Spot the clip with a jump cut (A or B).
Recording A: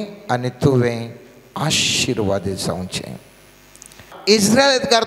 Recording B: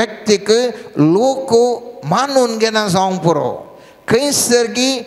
A